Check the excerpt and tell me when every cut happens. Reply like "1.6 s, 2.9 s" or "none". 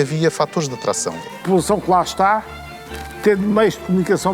1.1 s

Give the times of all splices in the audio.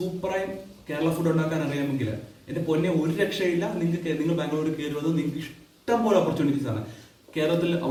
none

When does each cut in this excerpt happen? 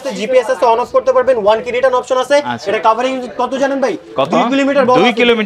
none

